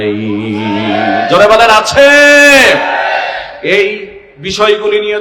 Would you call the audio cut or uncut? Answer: uncut